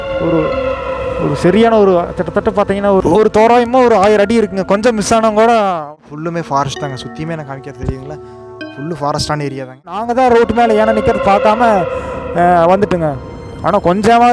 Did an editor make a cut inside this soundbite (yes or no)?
yes